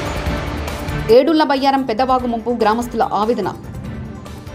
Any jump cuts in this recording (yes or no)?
no